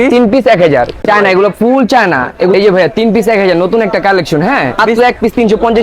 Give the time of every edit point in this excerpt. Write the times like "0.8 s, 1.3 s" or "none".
1.0 s, 2.5 s, 4.8 s